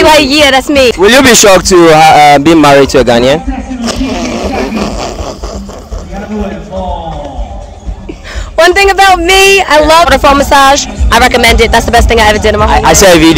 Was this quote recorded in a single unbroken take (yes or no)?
no